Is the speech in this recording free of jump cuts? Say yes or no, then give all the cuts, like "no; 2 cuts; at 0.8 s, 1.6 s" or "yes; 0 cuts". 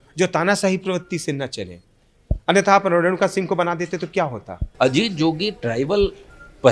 no; 1 cut; at 4.6 s